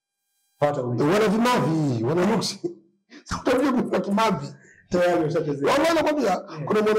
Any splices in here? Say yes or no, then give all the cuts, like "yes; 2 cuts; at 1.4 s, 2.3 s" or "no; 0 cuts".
no; 0 cuts